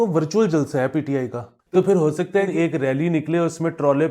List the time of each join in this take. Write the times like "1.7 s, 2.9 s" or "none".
1.5 s, 2.5 s